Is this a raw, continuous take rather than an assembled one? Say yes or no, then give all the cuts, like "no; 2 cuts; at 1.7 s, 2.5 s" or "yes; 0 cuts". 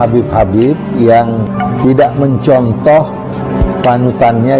no; 1 cut; at 1.5 s